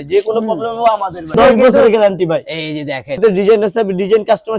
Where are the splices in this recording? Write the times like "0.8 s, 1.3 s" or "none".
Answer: 1.3 s, 3.2 s